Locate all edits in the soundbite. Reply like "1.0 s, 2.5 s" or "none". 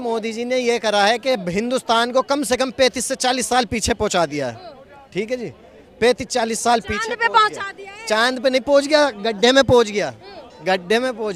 none